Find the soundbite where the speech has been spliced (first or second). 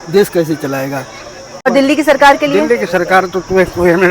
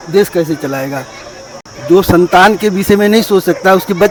first